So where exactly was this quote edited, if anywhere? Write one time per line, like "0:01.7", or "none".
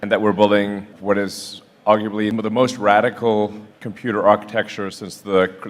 0:00.9
0:02.3